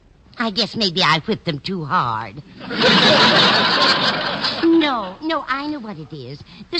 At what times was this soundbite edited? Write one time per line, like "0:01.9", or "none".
0:01.6